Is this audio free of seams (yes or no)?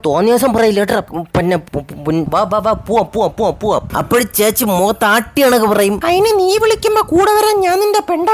no